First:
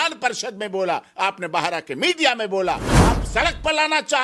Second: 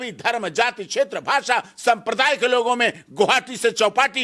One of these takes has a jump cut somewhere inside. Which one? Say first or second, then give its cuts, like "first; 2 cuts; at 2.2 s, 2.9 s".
first; 1 cut; at 2.9 s